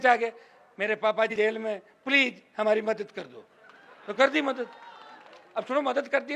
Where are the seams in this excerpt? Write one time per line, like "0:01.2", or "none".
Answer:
0:01.3